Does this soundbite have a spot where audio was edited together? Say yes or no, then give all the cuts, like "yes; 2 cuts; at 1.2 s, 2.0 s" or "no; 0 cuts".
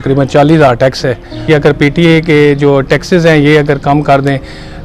yes; 1 cut; at 1.5 s